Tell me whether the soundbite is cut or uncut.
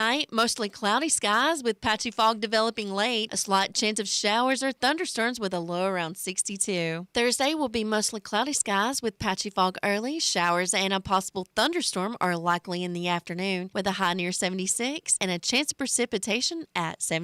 uncut